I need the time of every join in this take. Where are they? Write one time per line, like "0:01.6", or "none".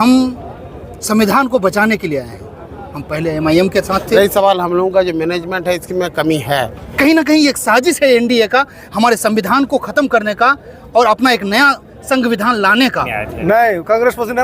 0:04.2
0:06.8
0:13.2